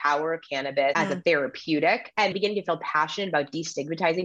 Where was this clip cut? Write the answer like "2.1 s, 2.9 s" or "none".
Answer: 0.9 s, 2.3 s